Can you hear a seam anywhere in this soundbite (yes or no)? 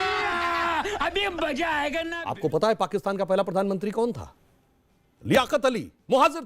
yes